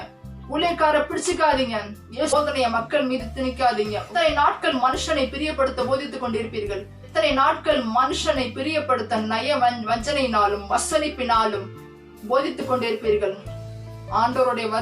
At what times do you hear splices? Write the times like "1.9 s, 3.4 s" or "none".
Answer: 2.3 s